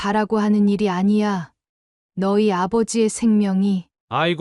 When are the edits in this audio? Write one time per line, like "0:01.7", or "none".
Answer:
none